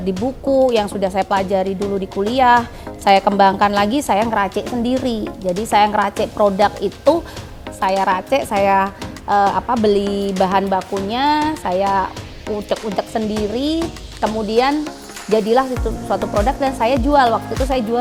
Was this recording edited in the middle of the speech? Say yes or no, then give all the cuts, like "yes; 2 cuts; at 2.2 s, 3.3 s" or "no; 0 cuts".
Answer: no; 0 cuts